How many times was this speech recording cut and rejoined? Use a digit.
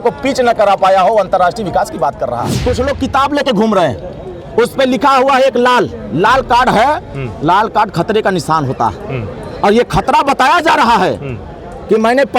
1